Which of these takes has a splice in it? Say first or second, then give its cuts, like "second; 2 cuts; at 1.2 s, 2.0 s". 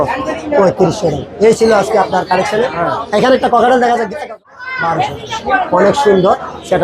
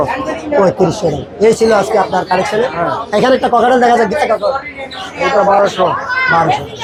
first; 1 cut; at 4.4 s